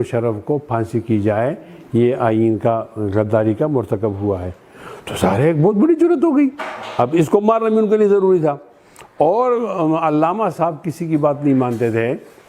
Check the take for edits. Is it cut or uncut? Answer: uncut